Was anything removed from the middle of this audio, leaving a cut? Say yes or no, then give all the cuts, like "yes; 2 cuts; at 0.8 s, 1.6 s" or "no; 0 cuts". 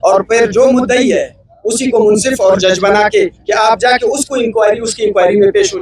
no; 0 cuts